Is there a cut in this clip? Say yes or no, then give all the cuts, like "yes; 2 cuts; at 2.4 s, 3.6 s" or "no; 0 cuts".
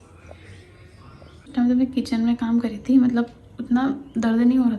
yes; 1 cut; at 1.5 s